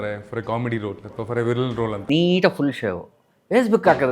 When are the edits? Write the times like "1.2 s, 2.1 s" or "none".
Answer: 2.0 s

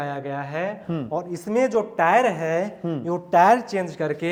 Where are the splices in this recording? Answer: none

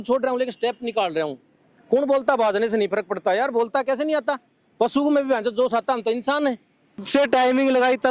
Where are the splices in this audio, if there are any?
7.1 s

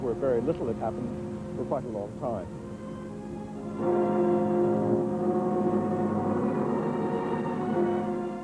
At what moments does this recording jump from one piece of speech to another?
5.3 s

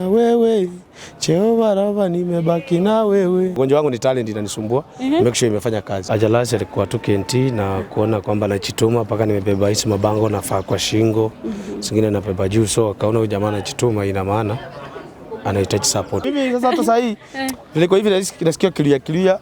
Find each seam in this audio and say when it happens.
3.6 s, 5.9 s, 16.2 s

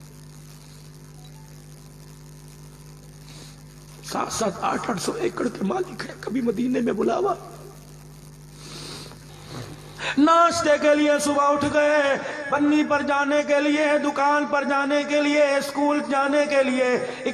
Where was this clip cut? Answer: 9.3 s

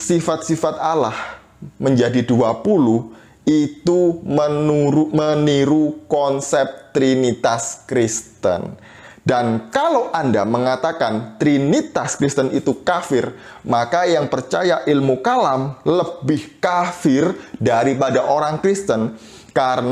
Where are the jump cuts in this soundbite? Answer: none

